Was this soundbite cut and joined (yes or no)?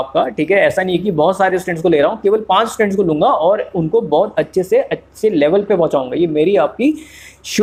no